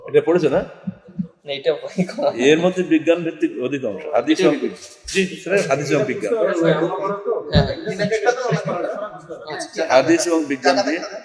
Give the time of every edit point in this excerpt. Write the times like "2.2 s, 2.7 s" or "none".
none